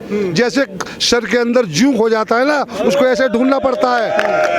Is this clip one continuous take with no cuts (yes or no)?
yes